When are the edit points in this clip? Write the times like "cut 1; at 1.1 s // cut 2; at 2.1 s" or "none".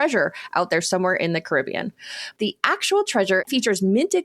cut 1; at 2.2 s // cut 2; at 3.4 s